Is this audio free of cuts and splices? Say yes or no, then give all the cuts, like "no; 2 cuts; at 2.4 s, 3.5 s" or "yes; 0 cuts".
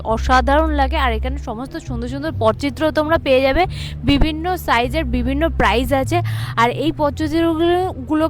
yes; 0 cuts